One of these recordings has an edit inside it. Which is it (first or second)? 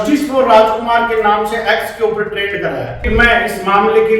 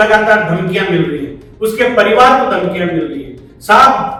first